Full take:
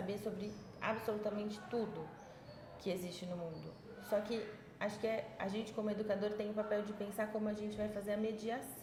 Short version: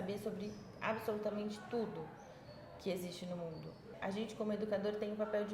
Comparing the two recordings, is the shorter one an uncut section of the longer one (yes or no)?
no